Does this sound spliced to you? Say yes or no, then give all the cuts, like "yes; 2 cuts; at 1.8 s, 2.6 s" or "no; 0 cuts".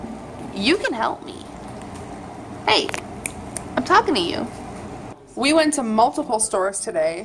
no; 0 cuts